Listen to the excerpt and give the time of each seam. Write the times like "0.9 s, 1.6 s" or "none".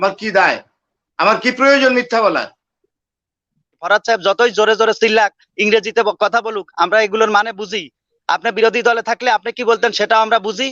3.9 s

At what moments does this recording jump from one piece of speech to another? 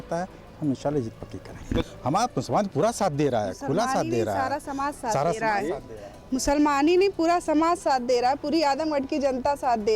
1.9 s

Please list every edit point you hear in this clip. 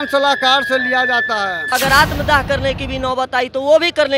1.7 s

